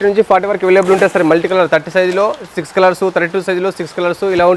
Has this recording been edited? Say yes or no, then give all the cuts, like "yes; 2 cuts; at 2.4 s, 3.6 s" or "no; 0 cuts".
no; 0 cuts